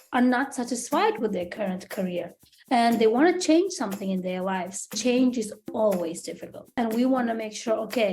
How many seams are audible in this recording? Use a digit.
3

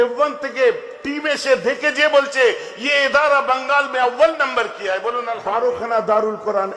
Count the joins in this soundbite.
1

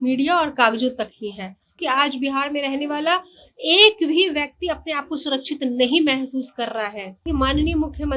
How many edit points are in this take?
2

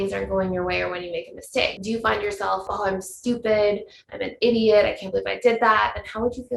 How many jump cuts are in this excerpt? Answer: 2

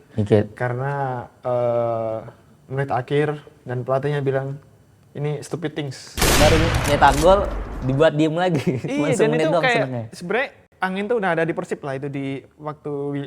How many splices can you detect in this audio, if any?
1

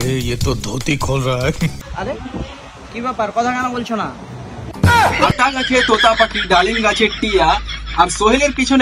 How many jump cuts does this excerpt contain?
0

